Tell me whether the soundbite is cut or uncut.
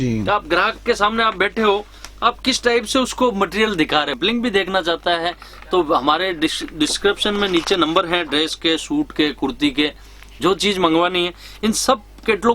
cut